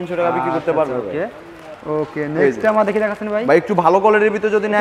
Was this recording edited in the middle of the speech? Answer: no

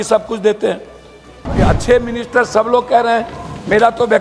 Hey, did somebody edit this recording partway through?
yes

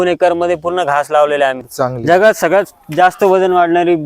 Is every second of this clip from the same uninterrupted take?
no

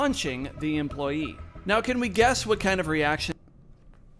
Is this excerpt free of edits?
yes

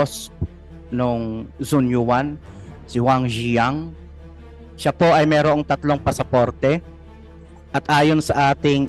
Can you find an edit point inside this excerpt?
no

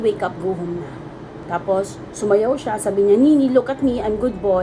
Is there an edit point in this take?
yes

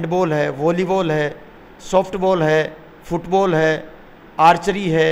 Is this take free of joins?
yes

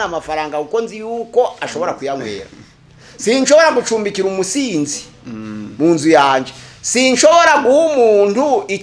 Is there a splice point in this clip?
no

